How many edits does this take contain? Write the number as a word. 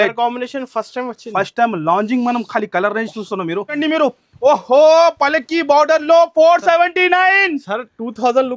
one